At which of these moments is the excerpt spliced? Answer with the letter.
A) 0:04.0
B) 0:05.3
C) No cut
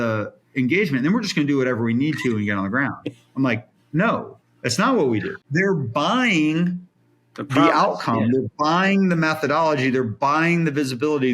B